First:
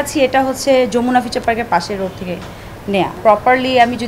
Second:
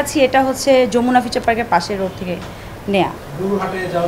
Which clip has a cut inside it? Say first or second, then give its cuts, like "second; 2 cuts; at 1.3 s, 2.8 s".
first; 1 cut; at 3.2 s